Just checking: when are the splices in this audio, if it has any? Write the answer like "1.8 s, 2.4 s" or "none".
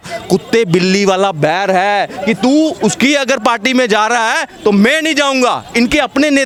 none